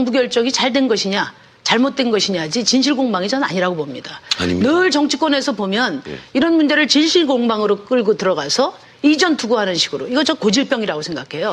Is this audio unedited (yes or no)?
no